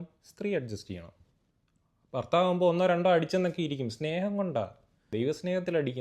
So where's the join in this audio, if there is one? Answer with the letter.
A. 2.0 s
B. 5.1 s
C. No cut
B